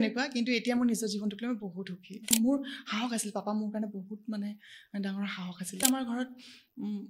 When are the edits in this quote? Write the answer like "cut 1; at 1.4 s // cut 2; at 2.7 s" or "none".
cut 1; at 2.3 s // cut 2; at 5.8 s